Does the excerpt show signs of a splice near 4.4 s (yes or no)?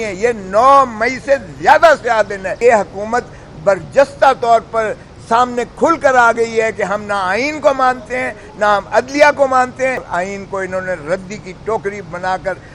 no